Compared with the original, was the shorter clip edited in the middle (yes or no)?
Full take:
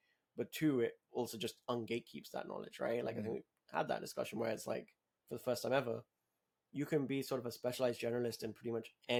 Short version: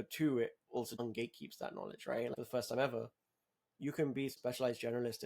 yes